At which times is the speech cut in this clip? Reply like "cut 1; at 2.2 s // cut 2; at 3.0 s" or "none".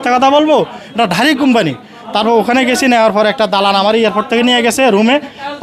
none